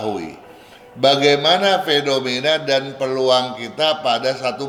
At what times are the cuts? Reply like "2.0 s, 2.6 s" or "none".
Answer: none